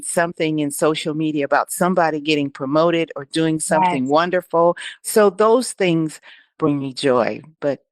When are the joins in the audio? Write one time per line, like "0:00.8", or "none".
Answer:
0:04.9